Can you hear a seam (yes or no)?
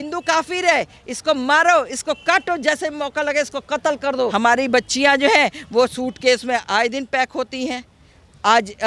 yes